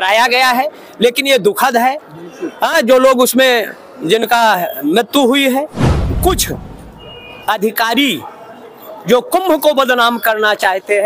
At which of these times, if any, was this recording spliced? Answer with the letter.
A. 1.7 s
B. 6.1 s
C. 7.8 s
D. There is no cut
B